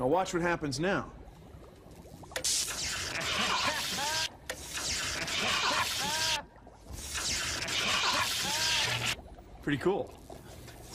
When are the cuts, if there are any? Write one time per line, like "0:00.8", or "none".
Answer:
0:09.8